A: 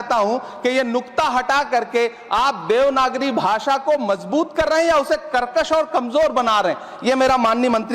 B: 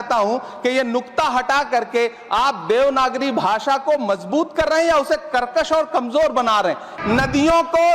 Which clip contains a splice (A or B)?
B